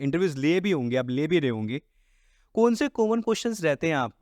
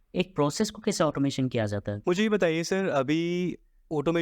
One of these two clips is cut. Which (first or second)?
second